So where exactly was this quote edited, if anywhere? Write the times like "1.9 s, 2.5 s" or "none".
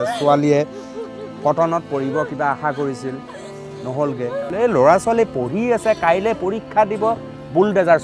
4.5 s